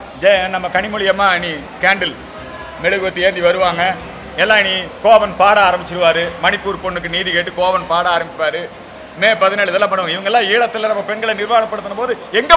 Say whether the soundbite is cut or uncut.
uncut